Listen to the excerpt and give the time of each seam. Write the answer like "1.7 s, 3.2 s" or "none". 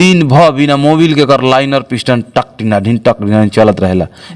none